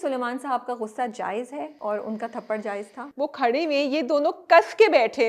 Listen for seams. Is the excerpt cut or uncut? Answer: cut